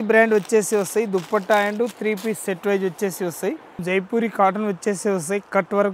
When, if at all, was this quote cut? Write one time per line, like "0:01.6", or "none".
0:03.8